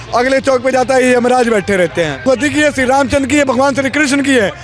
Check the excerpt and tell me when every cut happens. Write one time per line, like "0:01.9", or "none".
0:02.2